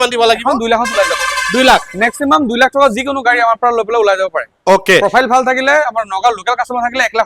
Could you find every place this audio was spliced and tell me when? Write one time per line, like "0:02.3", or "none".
none